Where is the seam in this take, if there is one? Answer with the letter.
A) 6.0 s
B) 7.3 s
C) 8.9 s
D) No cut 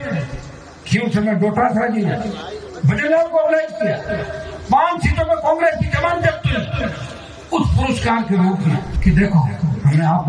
C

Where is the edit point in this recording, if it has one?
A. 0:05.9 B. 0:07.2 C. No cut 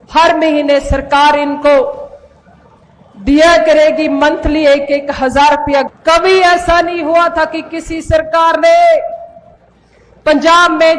A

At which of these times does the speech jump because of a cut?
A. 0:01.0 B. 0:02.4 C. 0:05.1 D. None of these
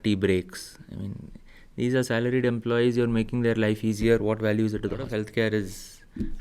C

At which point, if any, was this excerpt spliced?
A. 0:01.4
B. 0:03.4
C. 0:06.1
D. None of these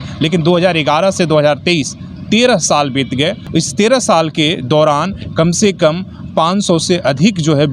B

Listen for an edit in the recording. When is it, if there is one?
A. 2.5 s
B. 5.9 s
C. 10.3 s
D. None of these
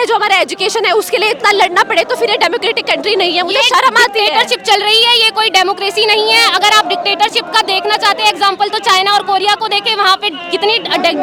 D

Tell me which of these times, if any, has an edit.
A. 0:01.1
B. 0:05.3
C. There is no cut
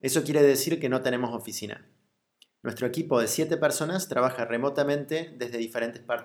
B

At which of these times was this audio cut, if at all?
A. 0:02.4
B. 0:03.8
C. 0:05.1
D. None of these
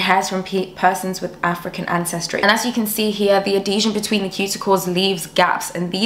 A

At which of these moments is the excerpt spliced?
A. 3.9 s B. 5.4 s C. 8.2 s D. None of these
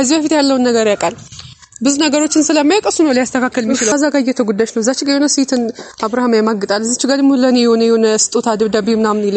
A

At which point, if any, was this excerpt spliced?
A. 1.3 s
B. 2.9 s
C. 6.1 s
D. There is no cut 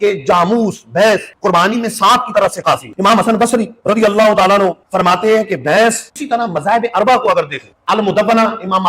C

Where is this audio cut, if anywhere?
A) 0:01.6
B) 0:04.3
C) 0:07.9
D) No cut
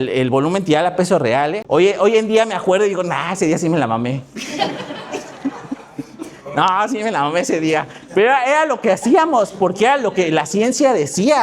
A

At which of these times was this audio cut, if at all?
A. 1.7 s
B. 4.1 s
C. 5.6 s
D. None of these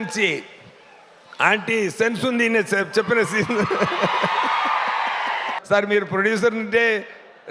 C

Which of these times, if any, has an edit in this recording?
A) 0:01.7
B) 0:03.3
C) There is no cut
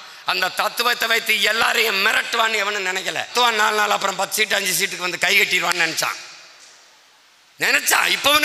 B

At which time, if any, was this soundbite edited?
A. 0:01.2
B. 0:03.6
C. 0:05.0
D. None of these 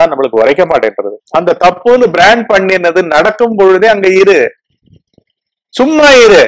A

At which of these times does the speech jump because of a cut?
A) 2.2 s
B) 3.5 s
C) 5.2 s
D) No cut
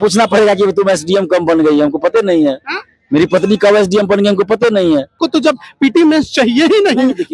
C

